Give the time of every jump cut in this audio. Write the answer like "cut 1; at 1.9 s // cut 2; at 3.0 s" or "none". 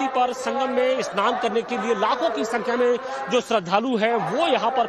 cut 1; at 1.1 s

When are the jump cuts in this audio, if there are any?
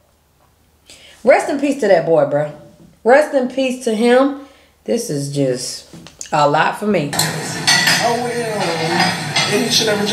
cut 1; at 7.2 s

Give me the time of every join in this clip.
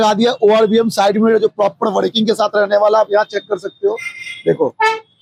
none

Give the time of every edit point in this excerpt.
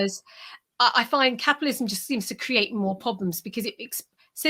none

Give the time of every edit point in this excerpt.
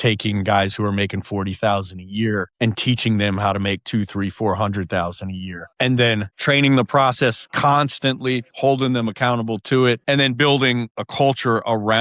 cut 1; at 8.5 s // cut 2; at 10.0 s // cut 3; at 11.0 s

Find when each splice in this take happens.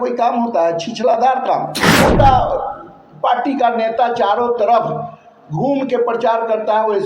cut 1; at 1.9 s

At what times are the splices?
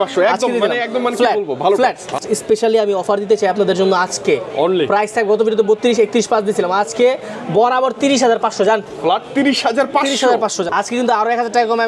cut 1; at 2.2 s // cut 2; at 10.7 s

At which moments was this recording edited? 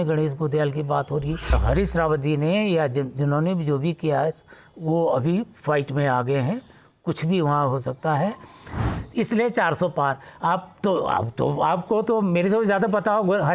cut 1; at 1.6 s // cut 2; at 8.9 s

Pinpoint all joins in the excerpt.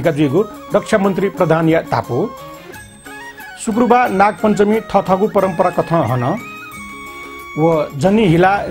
none

